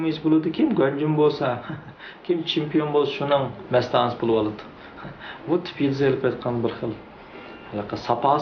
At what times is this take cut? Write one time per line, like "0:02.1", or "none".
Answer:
none